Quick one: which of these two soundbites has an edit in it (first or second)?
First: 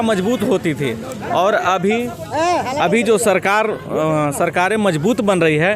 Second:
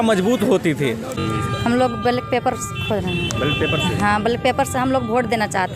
second